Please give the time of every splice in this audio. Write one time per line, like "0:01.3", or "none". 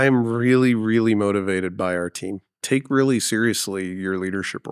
0:02.6